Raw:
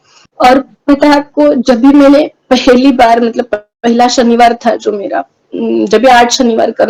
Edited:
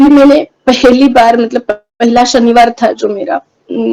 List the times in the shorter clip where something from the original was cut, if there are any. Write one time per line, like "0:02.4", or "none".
none